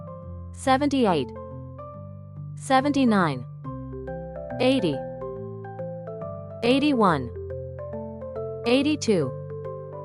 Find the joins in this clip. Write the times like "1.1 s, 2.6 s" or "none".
1.2 s, 2.7 s, 7.4 s, 8.6 s